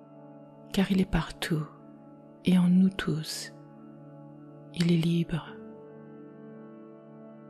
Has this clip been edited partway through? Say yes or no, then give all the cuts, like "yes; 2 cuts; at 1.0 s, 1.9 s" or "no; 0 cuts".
yes; 4 cuts; at 0.7 s, 3.3 s, 4.8 s, 5.4 s